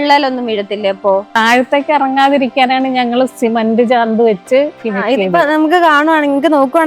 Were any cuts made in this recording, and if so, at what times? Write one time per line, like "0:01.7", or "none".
0:01.3
0:04.8